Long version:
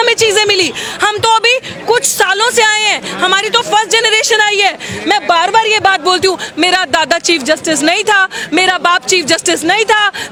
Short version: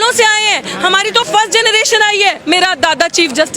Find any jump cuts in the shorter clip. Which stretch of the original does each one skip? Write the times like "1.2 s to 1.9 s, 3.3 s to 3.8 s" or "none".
4.8 s to 6.5 s